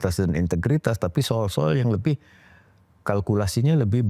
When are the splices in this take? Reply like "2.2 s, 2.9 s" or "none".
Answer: none